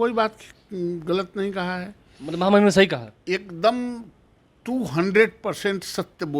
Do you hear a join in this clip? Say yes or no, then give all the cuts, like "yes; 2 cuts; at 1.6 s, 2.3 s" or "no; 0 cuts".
no; 0 cuts